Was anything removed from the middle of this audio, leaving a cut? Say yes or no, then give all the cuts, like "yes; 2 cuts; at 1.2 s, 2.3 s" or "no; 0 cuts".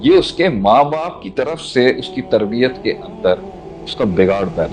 no; 0 cuts